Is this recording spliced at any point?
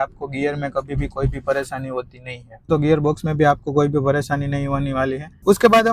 no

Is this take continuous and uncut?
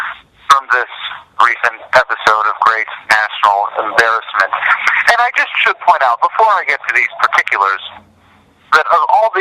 no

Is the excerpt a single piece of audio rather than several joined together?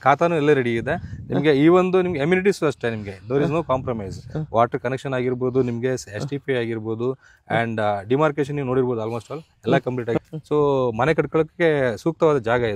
no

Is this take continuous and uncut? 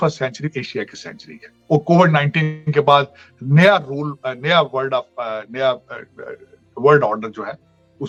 yes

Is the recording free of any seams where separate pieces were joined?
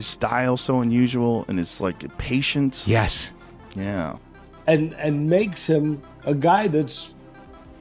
no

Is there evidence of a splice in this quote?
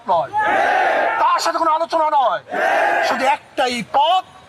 no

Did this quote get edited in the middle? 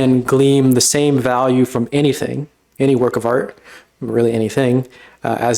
no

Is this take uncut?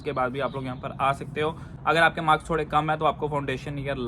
no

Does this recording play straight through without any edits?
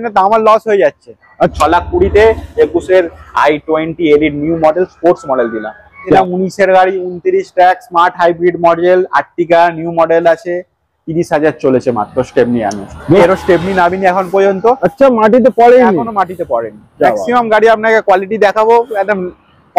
no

